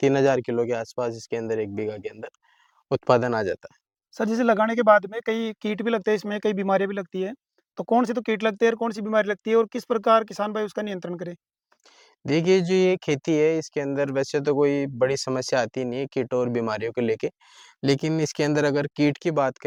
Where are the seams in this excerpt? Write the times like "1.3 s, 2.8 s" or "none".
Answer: none